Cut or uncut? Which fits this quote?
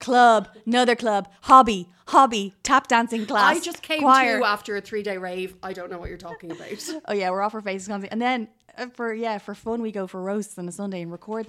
uncut